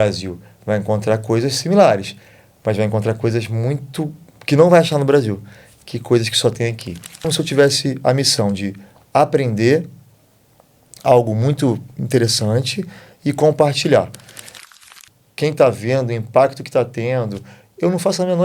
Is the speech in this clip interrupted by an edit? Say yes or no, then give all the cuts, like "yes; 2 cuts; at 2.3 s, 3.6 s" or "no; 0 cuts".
yes; 2 cuts; at 7.3 s, 14.7 s